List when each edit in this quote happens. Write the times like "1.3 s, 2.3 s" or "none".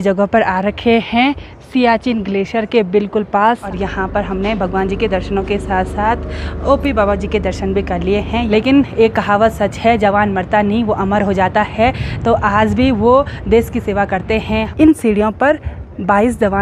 3.6 s, 8.5 s, 14.7 s